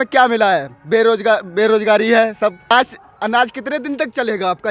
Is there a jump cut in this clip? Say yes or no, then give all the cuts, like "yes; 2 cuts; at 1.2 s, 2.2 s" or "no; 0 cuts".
yes; 1 cut; at 2.7 s